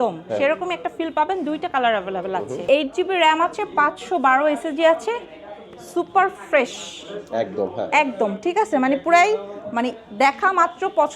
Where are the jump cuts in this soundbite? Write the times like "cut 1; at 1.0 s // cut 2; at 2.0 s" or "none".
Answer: cut 1; at 2.5 s